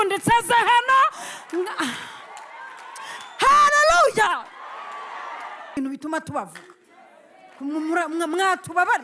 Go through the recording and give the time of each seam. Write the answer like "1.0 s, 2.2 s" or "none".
5.8 s